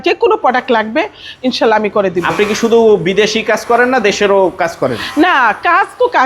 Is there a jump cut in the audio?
no; 0 cuts

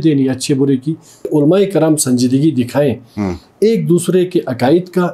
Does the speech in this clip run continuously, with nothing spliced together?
no; 1 cut; at 1.3 s

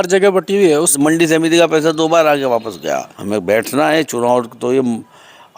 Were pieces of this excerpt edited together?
yes; 2 cuts; at 0.9 s, 3.1 s

